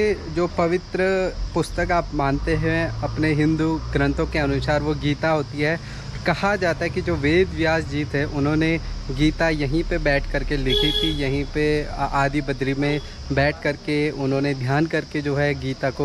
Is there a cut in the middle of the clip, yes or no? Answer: no